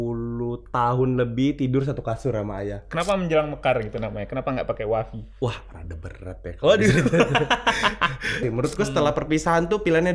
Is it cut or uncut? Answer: cut